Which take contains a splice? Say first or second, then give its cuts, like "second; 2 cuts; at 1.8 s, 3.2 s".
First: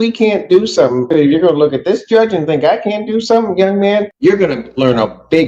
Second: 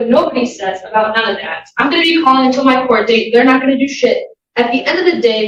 first; 2 cuts; at 1.1 s, 4.1 s